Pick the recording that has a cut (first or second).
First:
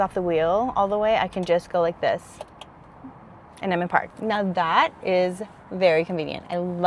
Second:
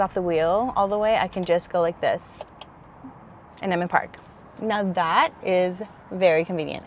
first